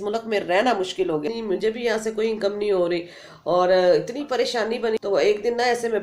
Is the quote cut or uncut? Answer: cut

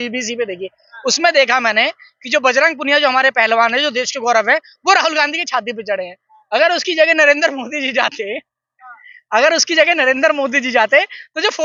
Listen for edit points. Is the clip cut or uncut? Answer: uncut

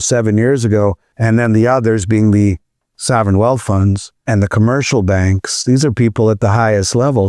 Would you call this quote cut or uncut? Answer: cut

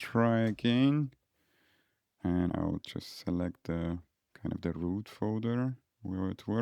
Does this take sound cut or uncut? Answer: cut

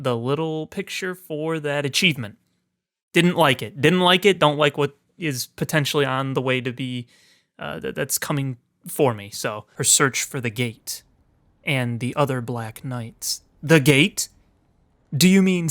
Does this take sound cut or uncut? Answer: cut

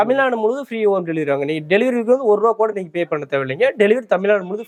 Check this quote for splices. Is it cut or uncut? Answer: uncut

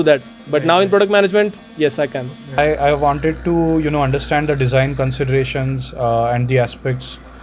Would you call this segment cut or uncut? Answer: cut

